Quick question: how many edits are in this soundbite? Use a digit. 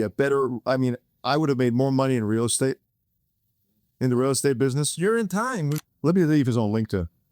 1